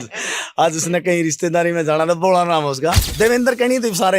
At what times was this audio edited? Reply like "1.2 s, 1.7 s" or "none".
3.1 s